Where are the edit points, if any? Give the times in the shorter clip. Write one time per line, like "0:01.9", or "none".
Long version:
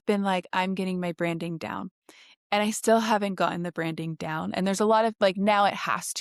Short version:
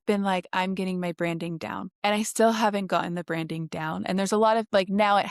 0:01.9

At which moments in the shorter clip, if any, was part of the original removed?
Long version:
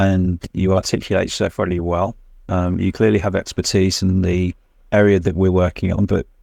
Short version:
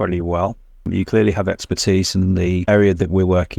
0:00.9
0:02.6

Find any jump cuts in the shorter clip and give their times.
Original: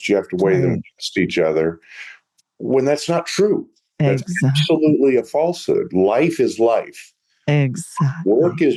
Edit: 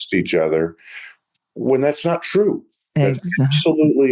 none

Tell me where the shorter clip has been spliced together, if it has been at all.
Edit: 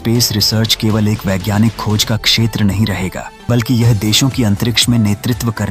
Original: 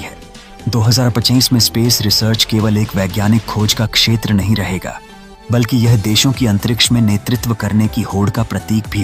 0:03.3

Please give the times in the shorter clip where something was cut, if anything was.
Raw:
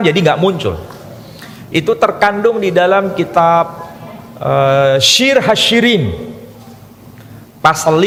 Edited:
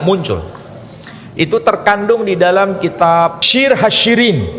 0:03.4

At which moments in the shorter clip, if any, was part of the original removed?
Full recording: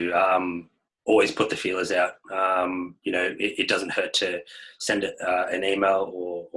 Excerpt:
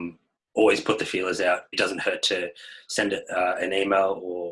0:01.8

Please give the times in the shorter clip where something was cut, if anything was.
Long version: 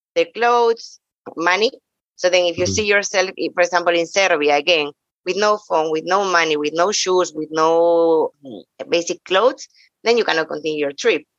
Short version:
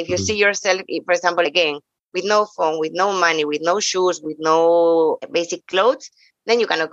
0:01.5
0:05.2

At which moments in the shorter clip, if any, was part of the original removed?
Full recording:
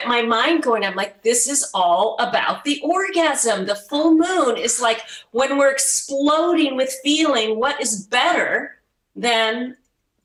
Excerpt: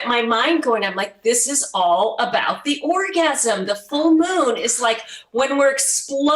none

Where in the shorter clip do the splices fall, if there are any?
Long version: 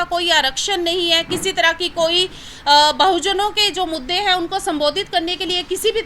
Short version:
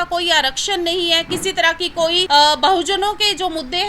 0:02.2

